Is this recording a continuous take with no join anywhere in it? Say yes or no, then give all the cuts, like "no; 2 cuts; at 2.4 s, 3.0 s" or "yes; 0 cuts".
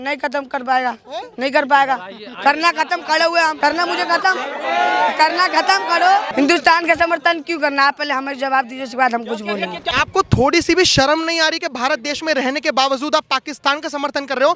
no; 3 cuts; at 3.5 s, 6.3 s, 9.9 s